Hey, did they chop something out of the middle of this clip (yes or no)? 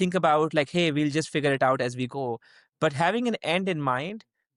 no